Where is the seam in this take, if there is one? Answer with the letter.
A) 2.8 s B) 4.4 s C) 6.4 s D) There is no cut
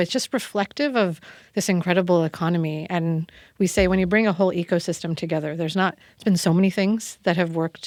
D